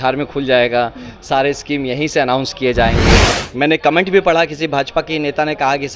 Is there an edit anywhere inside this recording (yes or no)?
yes